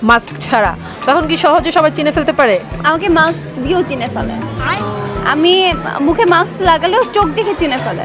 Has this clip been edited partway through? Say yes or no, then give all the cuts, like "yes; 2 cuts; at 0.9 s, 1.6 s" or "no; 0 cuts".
no; 0 cuts